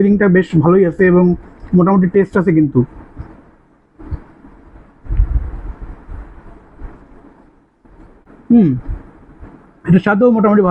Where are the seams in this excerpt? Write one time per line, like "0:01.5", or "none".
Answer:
0:08.2